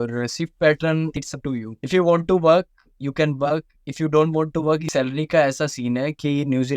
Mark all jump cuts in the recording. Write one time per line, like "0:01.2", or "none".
0:01.2
0:04.9

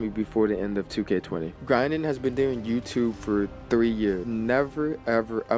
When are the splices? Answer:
0:01.5
0:03.6
0:04.2

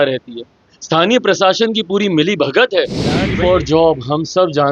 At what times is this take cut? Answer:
0:03.3

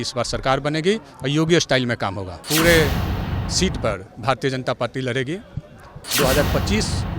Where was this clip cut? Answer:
0:02.4
0:06.0

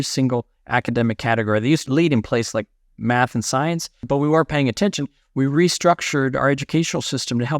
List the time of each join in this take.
0:01.8
0:04.0

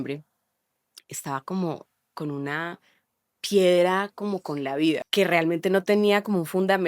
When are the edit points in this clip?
0:05.1

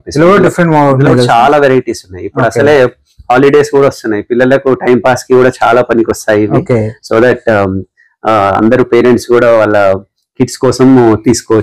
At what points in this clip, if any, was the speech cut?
none

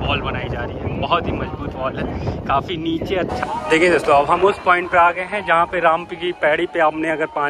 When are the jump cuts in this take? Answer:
0:03.4

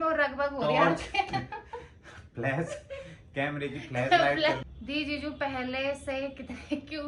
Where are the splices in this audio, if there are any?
0:04.6

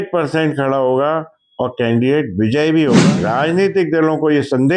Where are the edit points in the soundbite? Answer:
0:03.0

